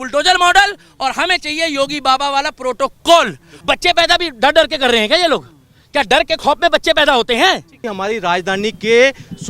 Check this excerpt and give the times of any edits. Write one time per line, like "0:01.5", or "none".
0:03.5
0:07.8